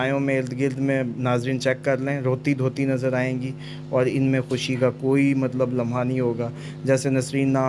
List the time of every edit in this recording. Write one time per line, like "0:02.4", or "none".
none